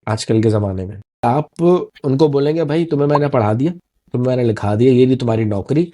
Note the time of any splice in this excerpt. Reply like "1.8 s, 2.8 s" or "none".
1.2 s